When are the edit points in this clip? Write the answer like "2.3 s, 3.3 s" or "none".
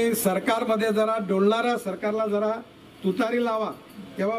none